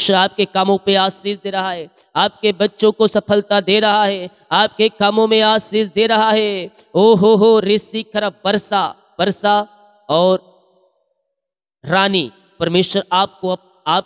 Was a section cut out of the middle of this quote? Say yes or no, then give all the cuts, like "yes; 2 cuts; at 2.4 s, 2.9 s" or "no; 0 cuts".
no; 0 cuts